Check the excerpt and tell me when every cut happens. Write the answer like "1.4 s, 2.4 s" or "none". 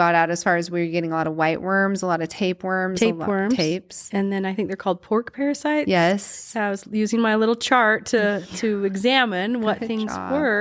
none